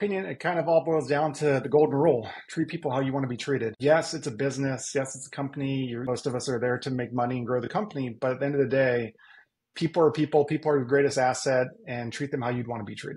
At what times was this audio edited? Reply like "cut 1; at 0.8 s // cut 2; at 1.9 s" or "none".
cut 1; at 3.8 s // cut 2; at 6.0 s